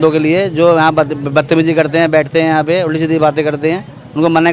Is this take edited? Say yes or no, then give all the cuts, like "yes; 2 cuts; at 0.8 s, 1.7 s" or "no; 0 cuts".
no; 0 cuts